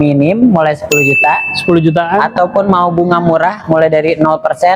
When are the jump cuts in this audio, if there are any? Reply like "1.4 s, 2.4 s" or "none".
none